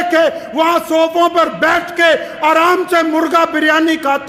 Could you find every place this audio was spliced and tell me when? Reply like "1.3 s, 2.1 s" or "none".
none